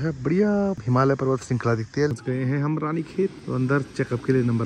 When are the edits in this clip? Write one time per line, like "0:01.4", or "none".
0:00.8
0:02.1
0:03.4

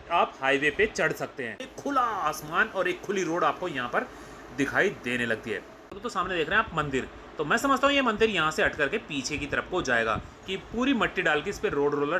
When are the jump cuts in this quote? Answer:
0:01.7
0:06.0
0:10.3

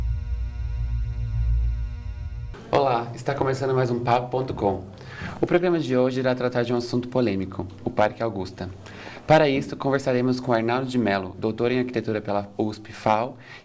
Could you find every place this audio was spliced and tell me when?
0:02.6

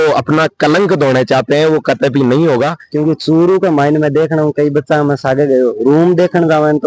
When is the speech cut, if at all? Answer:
0:02.8

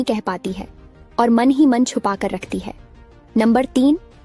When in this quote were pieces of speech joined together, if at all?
none

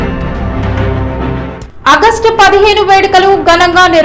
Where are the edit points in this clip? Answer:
0:01.2

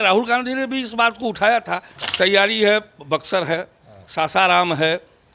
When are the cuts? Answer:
0:02.0

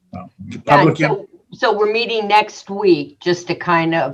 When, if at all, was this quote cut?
0:03.1

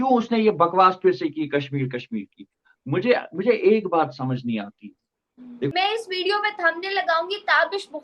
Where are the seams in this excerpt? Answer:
0:05.7

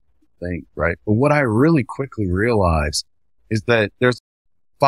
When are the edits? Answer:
0:03.9

